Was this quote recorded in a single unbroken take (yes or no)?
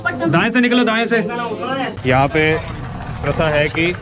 no